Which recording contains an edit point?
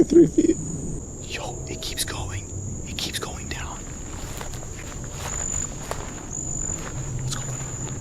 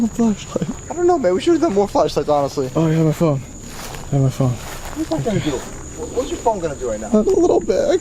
first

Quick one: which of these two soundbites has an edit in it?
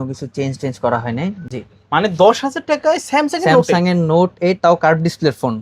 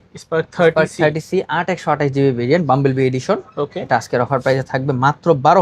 first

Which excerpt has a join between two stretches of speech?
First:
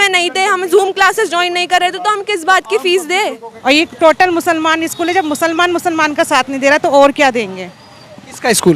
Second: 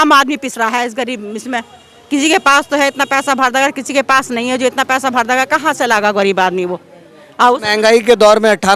first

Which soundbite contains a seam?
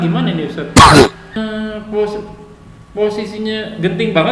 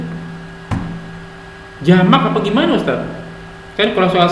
first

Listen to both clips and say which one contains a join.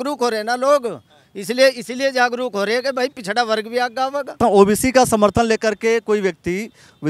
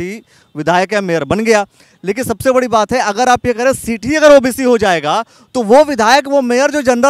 first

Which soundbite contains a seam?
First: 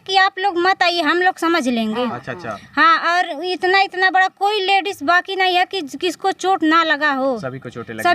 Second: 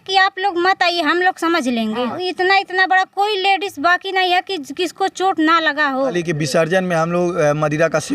second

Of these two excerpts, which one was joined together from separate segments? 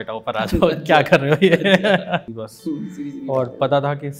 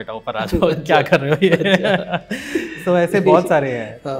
first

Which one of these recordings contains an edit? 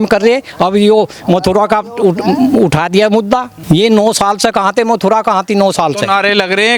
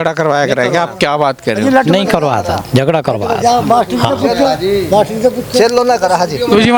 first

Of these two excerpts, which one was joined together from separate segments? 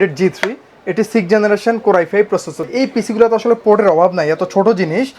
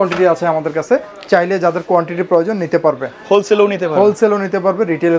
first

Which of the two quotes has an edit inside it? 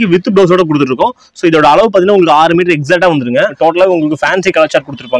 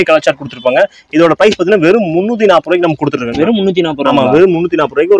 first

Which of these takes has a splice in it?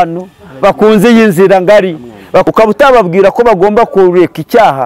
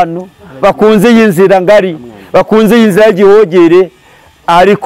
first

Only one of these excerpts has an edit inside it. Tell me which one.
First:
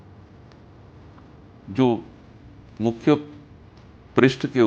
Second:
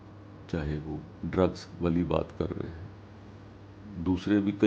second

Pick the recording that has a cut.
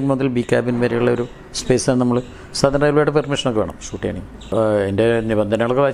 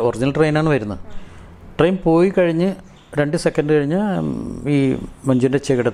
first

